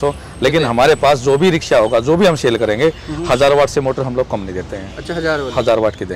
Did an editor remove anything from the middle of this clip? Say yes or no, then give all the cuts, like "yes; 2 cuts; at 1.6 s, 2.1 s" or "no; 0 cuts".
no; 0 cuts